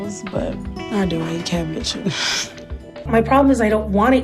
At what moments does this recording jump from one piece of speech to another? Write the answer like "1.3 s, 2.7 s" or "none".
3.0 s